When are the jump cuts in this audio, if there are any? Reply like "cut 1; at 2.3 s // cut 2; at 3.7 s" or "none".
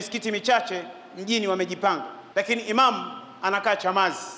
cut 1; at 2.2 s